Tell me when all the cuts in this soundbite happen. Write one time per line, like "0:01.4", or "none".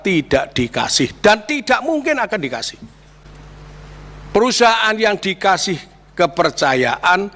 0:03.2